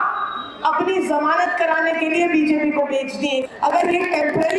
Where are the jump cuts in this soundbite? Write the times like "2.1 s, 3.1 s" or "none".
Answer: 3.4 s